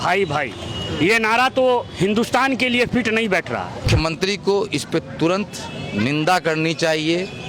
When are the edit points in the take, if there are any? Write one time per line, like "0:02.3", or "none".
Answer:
0:03.8